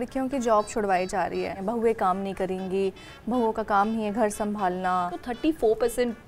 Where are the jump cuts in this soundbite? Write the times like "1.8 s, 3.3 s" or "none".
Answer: 1.6 s, 5.2 s

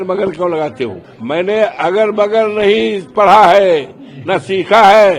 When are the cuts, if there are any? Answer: 1.1 s

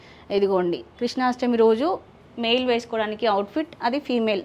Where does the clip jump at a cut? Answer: none

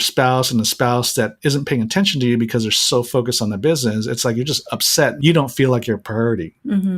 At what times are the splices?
5.1 s

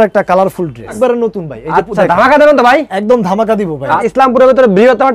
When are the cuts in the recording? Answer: 1.0 s, 4.0 s

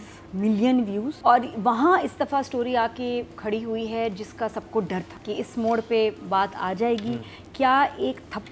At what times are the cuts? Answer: 1.1 s, 5.1 s

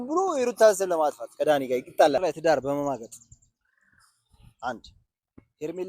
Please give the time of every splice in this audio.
2.2 s

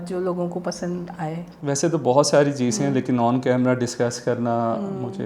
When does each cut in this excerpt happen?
1.5 s

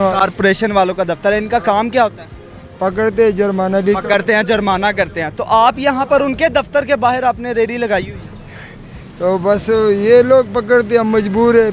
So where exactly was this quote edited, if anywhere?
none

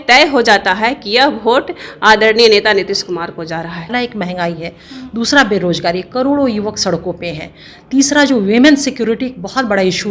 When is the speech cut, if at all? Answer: 3.8 s

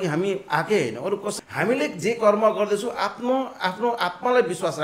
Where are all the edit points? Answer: 1.3 s

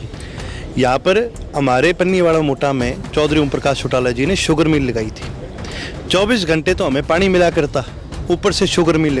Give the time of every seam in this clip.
none

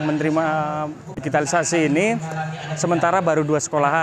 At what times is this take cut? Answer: 1.1 s

